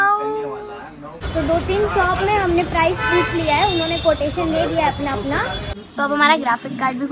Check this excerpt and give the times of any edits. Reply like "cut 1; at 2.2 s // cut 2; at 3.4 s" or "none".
cut 1; at 1.1 s // cut 2; at 5.7 s